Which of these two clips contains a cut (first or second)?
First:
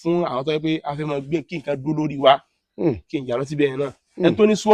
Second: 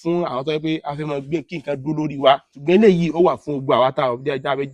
second